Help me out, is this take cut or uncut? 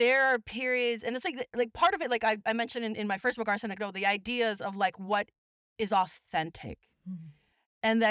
uncut